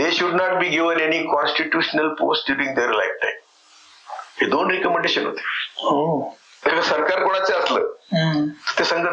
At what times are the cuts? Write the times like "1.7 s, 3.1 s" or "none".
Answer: 6.6 s